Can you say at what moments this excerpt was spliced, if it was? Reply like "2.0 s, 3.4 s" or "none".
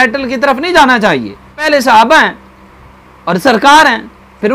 1.6 s